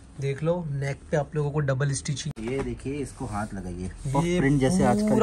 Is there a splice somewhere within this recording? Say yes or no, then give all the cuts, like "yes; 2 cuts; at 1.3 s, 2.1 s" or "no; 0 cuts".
yes; 1 cut; at 2.2 s